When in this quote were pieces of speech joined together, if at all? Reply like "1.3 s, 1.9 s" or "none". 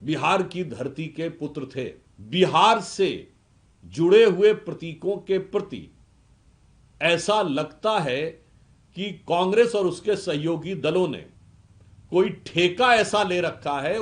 2.1 s